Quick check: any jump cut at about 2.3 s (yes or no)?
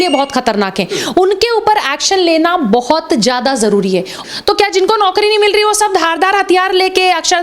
no